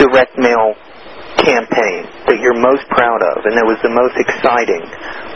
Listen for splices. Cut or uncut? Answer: uncut